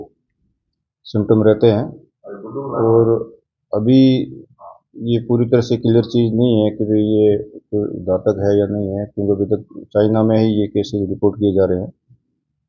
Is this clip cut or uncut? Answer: uncut